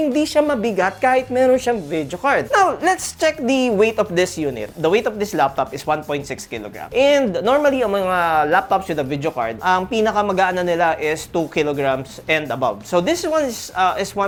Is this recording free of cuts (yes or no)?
yes